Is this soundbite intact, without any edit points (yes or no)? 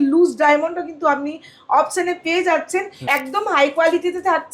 no